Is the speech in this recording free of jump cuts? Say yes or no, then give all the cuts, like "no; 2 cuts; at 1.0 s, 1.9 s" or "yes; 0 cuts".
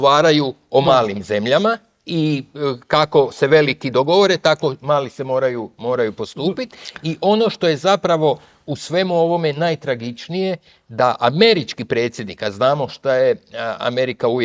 yes; 0 cuts